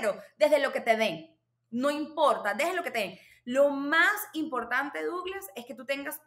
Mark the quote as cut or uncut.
uncut